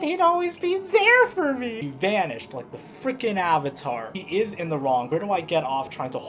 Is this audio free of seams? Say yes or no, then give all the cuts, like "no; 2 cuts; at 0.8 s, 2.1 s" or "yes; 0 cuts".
no; 3 cuts; at 1.7 s, 4.1 s, 5.1 s